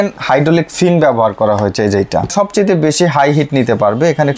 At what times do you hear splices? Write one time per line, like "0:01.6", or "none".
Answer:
0:02.3